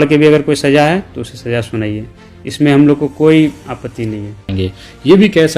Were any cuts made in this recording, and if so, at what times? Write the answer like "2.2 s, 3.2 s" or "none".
4.5 s

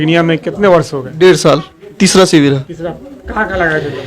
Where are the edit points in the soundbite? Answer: 1.9 s

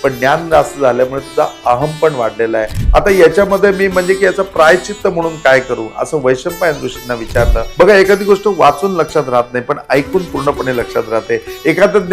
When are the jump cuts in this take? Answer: 2.8 s, 7.6 s

